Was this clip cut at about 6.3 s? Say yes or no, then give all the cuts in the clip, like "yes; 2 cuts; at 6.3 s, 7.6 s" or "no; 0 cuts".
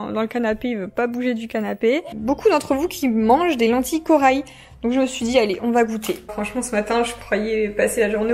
yes; 2 cuts; at 2.1 s, 6.3 s